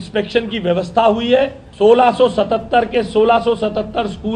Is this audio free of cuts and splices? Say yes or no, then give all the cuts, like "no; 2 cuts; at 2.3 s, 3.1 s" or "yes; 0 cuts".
no; 1 cut; at 1.6 s